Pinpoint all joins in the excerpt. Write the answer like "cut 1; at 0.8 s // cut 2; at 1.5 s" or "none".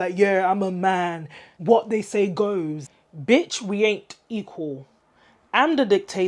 cut 1; at 2.8 s